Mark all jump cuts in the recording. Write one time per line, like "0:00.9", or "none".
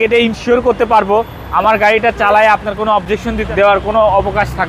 0:03.4